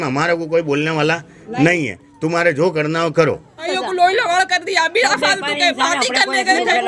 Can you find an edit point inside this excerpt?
yes; 1 cut; at 3.7 s

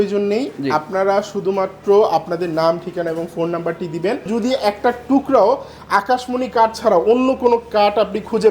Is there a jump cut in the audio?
yes; 1 cut; at 4.3 s

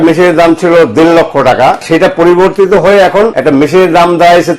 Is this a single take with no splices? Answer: no; 2 cuts; at 1.8 s, 3.4 s

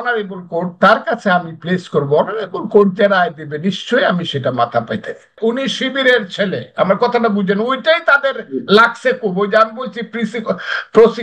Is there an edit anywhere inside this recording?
yes; 1 cut; at 5.4 s

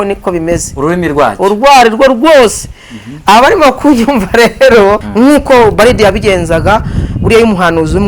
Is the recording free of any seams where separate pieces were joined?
no; 1 cut; at 5.1 s

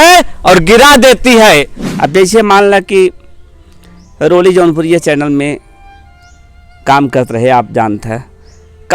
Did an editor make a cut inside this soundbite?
yes; 1 cut; at 1.8 s

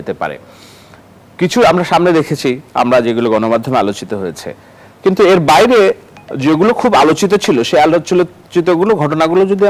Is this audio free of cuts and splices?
yes; 0 cuts

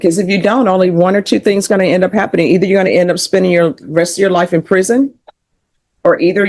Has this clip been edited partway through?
no; 0 cuts

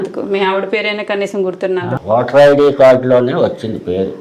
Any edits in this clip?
yes; 1 cut; at 2.0 s

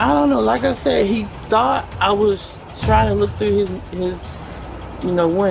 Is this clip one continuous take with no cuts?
yes; 0 cuts

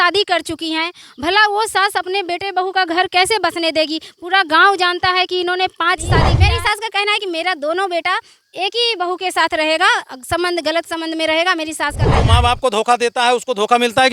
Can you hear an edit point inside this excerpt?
yes; 2 cuts; at 6.3 s, 12.1 s

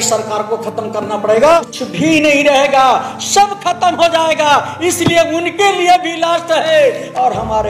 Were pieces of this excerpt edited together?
yes; 1 cut; at 1.7 s

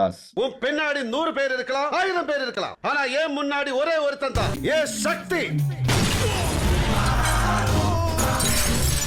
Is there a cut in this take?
no; 0 cuts

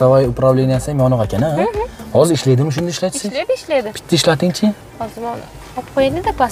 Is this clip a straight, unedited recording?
yes; 0 cuts

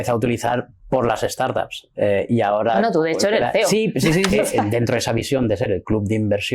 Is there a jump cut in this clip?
yes; 1 cut; at 4.6 s

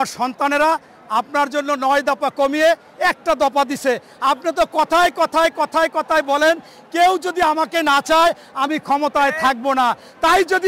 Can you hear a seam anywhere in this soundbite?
no; 0 cuts

